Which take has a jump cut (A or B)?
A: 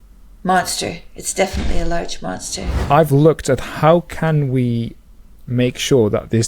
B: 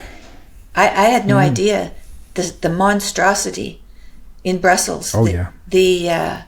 A